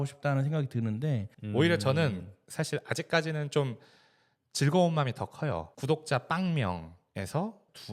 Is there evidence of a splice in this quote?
yes; 2 cuts; at 1.3 s, 5.7 s

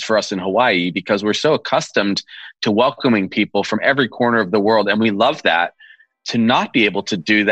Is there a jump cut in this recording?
no; 0 cuts

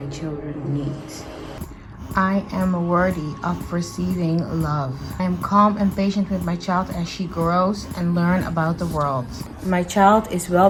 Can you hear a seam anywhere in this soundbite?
no; 0 cuts

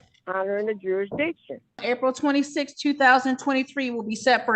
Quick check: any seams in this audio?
yes; 1 cut; at 1.8 s

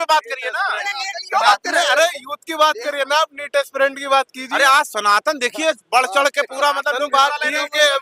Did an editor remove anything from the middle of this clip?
no; 0 cuts

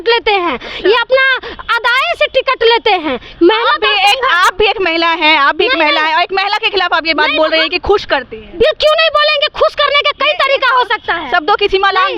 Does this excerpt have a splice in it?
no; 0 cuts

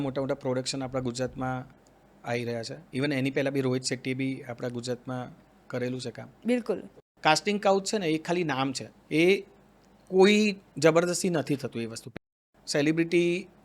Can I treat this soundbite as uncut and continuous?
no; 2 cuts; at 6.9 s, 12.2 s

